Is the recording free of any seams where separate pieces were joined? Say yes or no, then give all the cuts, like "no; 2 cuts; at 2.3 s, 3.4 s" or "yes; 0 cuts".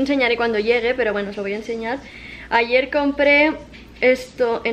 yes; 0 cuts